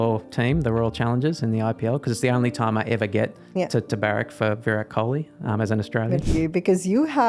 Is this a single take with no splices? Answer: no; 1 cut; at 6.2 s

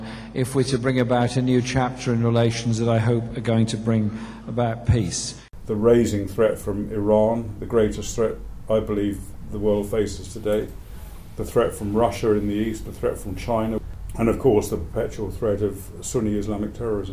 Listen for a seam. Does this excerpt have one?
yes; 2 cuts; at 5.4 s, 13.8 s

